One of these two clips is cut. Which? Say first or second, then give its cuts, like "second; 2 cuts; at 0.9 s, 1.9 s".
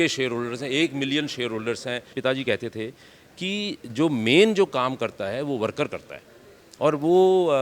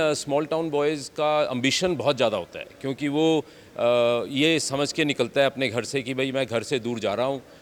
first; 1 cut; at 2.1 s